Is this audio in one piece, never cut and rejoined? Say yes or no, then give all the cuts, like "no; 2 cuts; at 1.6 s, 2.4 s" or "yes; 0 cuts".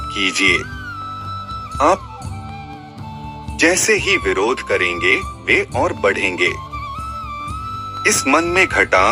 yes; 0 cuts